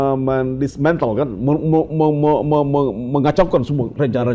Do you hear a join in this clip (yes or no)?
no